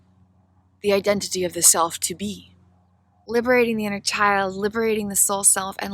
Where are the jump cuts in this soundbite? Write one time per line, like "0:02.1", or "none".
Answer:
0:03.2